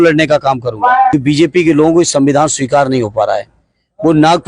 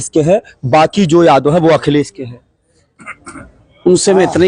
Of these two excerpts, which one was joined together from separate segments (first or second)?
first